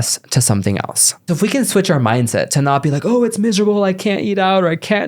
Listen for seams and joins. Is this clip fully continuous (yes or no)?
no